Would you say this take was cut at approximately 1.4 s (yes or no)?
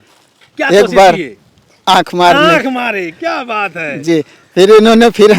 no